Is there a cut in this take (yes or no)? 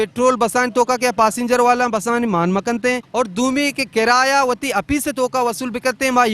yes